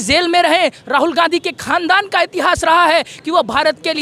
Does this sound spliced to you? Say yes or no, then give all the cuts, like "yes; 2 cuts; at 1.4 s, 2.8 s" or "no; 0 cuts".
no; 0 cuts